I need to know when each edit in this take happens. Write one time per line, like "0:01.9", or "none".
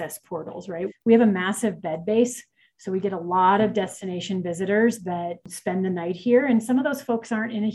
0:00.9
0:05.5